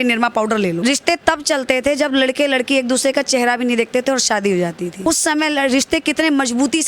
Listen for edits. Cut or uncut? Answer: cut